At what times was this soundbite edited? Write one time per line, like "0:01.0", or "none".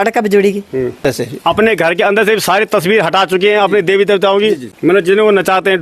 0:01.0
0:04.7

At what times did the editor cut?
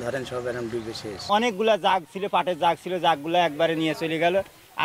0:01.3

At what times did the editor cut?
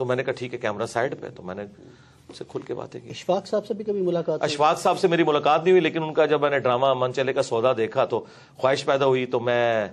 none

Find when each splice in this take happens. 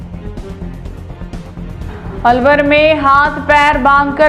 0:01.9

